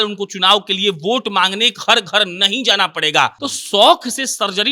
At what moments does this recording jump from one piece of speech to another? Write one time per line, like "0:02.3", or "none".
0:03.5